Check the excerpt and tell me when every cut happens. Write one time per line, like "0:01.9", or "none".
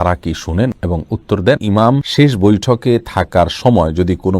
0:01.6

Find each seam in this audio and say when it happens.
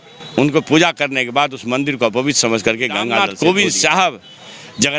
0:03.3

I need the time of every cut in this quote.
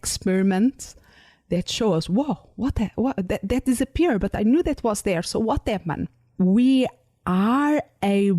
0:06.2

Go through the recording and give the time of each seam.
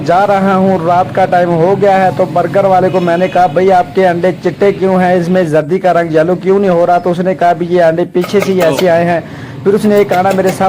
none

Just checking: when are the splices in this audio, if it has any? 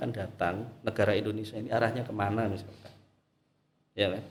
none

